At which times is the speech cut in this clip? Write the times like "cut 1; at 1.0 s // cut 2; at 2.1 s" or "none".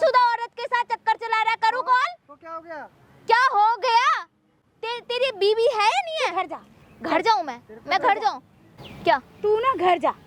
none